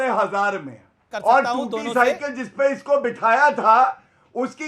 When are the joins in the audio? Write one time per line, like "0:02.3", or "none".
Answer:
0:01.1